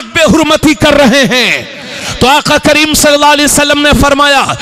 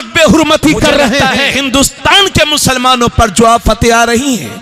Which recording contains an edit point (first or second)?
second